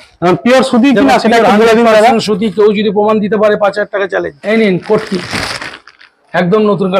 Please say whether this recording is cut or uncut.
cut